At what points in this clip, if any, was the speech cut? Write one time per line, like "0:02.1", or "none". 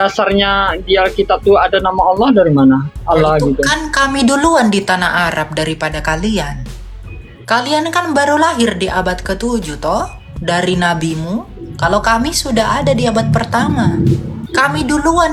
none